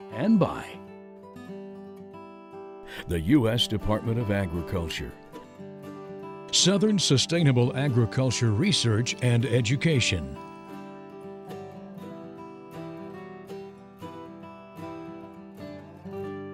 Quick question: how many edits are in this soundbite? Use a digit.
0